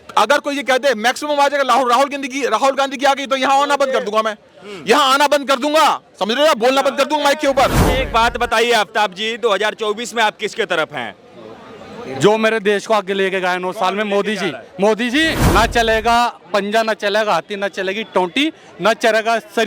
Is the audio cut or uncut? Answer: cut